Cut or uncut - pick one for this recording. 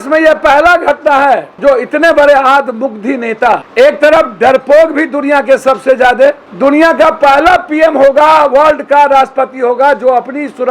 cut